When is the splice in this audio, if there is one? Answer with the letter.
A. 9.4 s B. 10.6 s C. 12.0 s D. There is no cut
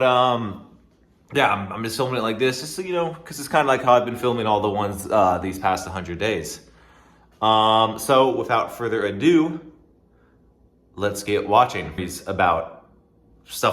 C